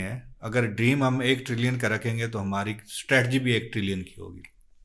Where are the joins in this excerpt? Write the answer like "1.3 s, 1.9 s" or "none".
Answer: none